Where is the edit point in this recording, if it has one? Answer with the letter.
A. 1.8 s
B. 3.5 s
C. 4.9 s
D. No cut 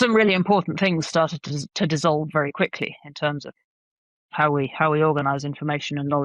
D